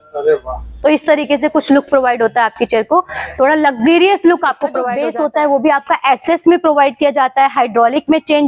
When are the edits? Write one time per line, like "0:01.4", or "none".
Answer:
0:04.9